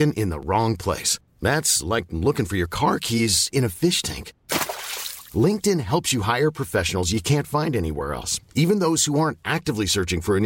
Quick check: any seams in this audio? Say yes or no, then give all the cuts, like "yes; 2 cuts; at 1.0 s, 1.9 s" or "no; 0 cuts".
no; 0 cuts